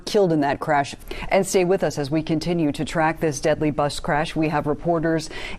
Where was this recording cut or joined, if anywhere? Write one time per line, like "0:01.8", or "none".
0:01.0